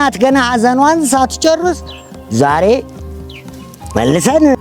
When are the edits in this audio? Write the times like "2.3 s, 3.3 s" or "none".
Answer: none